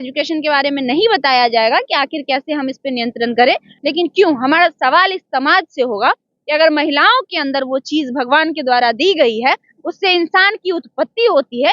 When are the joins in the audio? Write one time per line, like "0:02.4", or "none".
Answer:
0:03.7